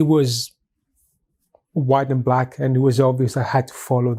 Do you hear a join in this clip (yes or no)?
no